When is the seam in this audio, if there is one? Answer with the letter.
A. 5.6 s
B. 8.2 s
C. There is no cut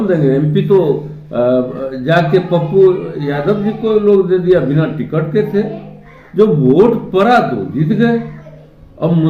C